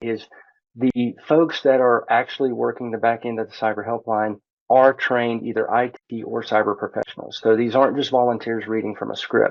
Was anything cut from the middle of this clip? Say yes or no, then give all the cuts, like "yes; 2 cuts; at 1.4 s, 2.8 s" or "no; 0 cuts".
no; 0 cuts